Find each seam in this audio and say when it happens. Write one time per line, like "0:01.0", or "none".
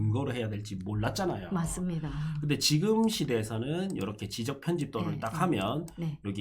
none

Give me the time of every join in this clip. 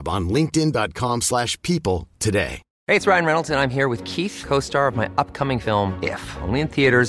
0:02.7

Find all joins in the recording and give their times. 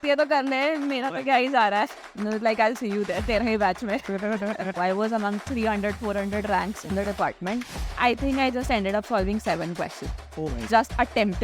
0:02.0
0:04.7
0:08.0

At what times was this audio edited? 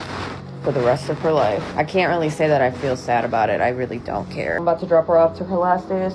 0:01.7
0:04.6

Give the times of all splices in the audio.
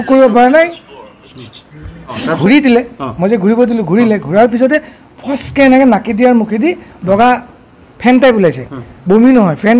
0:02.1

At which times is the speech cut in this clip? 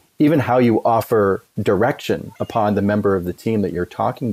0:02.3

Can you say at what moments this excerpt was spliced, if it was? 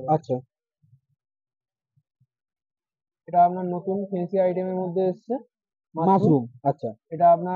none

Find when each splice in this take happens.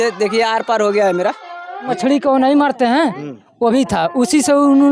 0:01.9

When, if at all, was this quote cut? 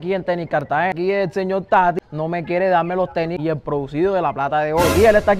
0:01.0
0:03.4

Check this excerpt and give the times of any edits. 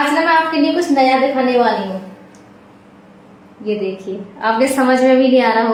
none

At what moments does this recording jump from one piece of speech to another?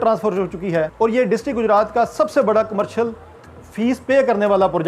0:00.9

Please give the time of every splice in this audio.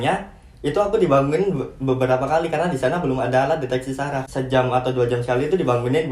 0:04.2

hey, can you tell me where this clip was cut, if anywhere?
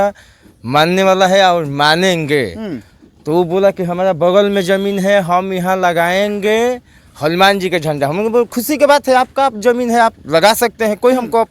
none

